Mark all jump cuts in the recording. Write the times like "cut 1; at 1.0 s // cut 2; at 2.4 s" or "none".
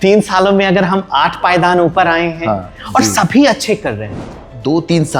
cut 1; at 4.3 s